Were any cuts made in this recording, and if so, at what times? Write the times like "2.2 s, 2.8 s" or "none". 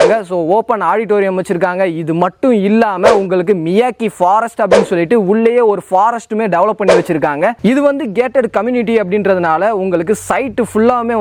none